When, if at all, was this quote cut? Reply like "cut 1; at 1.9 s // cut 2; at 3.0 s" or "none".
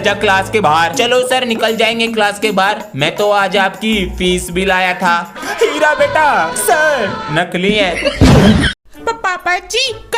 none

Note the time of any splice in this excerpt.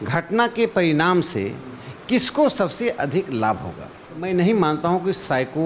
cut 1; at 4.2 s

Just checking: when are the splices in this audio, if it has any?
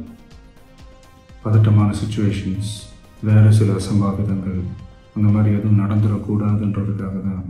none

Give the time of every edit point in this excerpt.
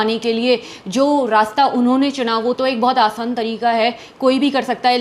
none

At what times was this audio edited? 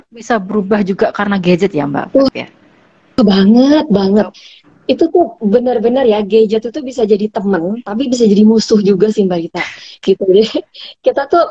none

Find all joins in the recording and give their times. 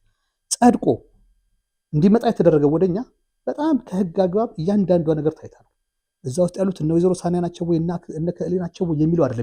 none

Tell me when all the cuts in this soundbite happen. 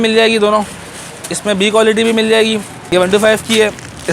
cut 1; at 2.8 s

